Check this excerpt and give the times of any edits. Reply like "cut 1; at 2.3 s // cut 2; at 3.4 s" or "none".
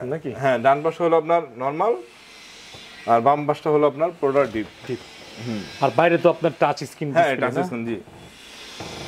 none